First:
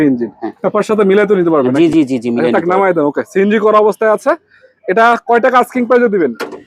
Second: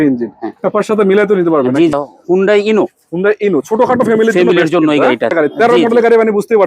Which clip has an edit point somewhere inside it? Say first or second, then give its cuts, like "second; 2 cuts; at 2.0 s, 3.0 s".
second; 2 cuts; at 1.9 s, 5.3 s